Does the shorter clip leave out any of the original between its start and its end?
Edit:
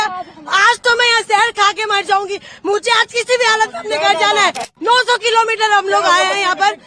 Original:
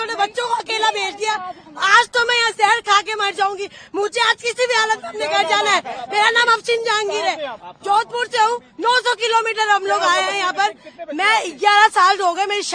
yes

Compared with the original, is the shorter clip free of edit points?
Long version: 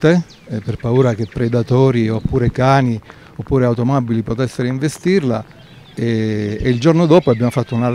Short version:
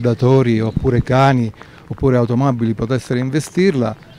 yes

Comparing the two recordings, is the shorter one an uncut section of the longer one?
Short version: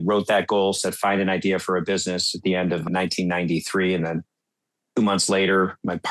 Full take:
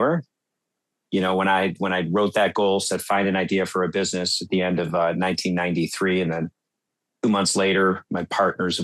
no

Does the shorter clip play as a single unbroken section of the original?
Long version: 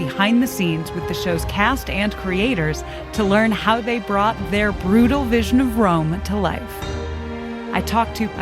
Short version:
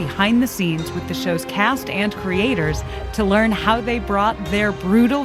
yes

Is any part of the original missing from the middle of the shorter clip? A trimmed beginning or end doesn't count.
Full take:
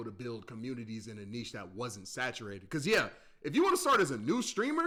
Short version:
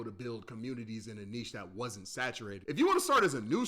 yes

